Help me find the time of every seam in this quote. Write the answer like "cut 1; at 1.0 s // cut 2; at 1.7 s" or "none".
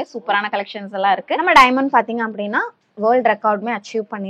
cut 1; at 1.4 s